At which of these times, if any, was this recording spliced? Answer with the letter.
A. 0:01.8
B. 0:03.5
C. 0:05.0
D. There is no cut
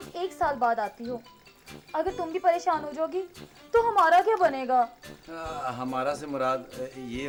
D